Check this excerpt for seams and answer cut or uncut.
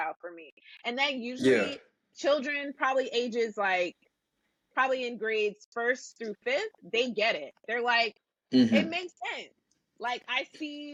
uncut